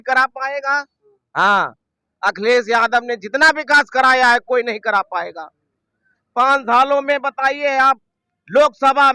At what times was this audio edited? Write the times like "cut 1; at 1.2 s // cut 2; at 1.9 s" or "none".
none

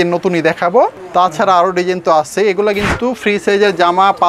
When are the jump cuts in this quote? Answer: cut 1; at 1.0 s

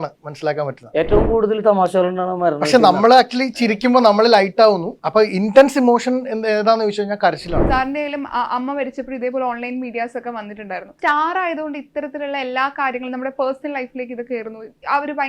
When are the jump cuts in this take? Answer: cut 1; at 4.9 s // cut 2; at 7.6 s // cut 3; at 10.9 s

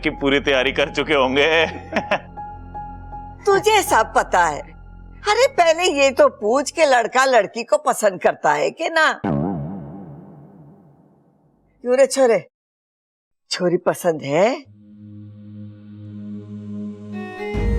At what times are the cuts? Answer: none

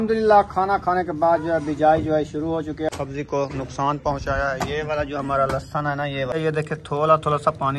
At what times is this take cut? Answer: cut 1; at 2.9 s // cut 2; at 6.3 s

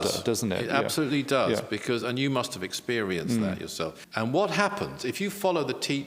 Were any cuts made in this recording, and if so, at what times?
cut 1; at 4.0 s

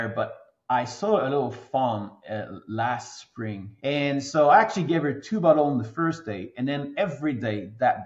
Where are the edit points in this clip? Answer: cut 1; at 3.7 s

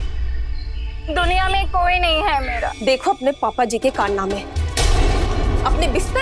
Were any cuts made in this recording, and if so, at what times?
cut 1; at 2.7 s

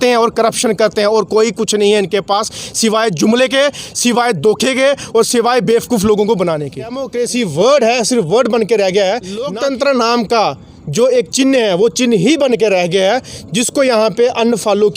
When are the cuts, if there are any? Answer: cut 1; at 7.1 s // cut 2; at 9.5 s

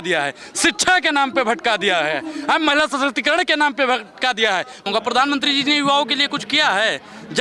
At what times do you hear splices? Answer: cut 1; at 4.9 s

